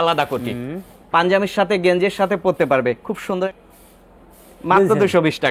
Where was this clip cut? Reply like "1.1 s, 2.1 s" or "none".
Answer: 3.5 s